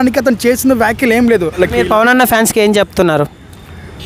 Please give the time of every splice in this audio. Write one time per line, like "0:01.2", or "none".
0:01.6